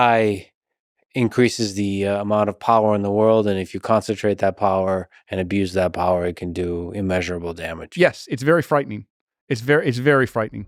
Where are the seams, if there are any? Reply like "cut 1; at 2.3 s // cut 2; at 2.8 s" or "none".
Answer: none